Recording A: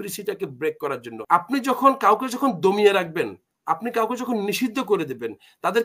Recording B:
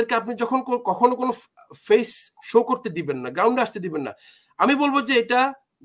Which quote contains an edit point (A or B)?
A